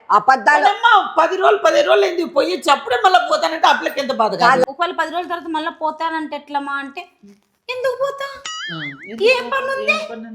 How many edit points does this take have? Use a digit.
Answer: 1